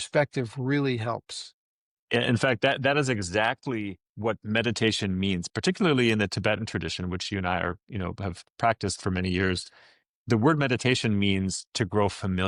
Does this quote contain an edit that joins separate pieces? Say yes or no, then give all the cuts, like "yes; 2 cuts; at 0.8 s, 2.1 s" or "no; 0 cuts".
no; 0 cuts